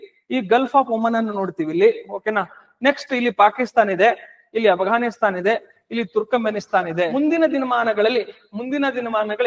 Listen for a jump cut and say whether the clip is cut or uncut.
cut